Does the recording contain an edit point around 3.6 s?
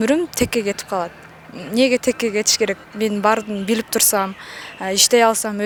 no; 0 cuts

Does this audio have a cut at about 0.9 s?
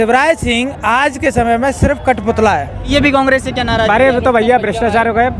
no; 1 cut; at 2.9 s

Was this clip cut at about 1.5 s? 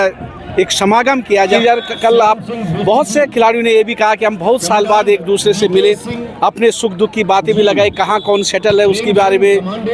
yes; 1 cut; at 1.5 s

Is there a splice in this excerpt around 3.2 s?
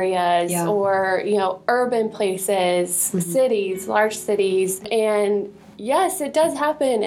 no; 1 cut; at 4.9 s

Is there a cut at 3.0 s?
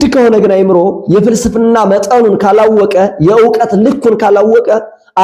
no; 0 cuts

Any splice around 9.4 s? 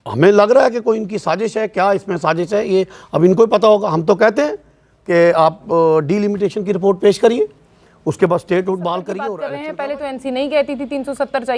yes; 1 cut; at 9.4 s

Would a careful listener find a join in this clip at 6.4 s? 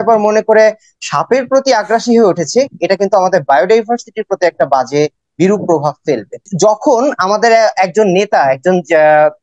yes; 1 cut; at 6.4 s

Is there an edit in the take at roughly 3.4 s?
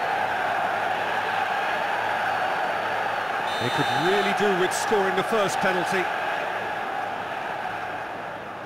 no; 0 cuts

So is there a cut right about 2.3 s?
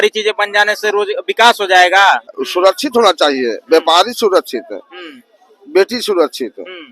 yes; 1 cut; at 2.3 s

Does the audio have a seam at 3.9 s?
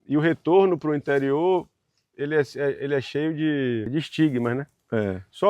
yes; 1 cut; at 3.9 s

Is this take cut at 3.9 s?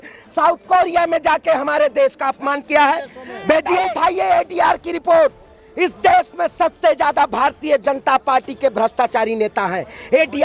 yes; 1 cut; at 3.9 s

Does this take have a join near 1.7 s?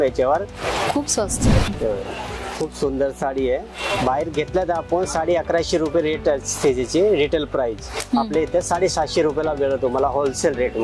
yes; 1 cut; at 1.7 s

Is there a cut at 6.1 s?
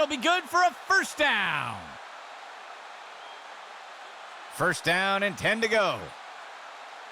yes; 3 cuts; at 1.8 s, 4.5 s, 6.1 s

